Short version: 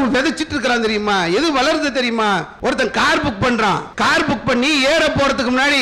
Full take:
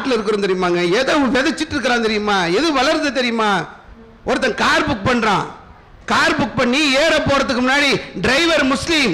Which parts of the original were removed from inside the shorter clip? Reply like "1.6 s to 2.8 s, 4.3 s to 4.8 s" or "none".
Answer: 3.7 s to 4.1 s, 5.5 s to 6.0 s